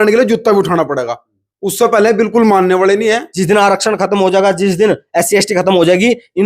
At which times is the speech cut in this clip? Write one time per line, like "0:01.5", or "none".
0:03.3